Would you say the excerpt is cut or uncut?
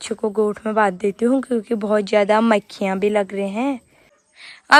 uncut